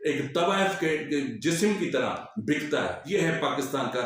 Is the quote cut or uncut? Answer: cut